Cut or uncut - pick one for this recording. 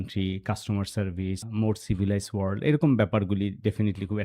cut